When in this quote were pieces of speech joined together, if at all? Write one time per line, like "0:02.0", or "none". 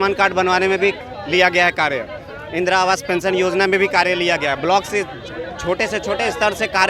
none